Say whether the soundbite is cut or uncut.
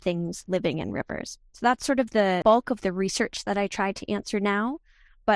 cut